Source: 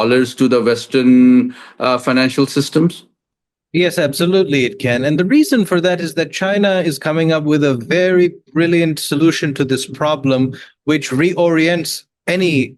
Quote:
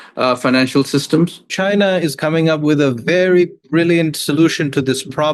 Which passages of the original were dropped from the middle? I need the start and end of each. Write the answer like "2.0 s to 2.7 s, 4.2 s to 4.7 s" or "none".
3.1 s to 6.3 s